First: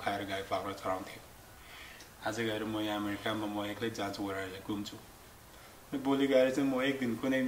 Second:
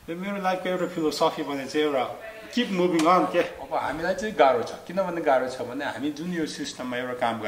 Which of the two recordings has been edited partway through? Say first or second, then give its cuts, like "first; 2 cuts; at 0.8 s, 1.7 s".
second; 1 cut; at 3.6 s